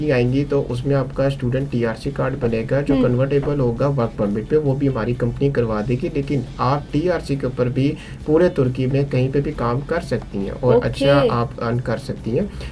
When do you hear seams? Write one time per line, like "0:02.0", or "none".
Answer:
none